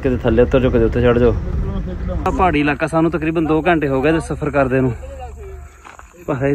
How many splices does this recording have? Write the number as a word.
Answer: one